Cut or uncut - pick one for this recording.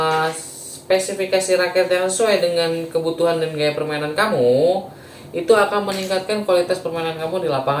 uncut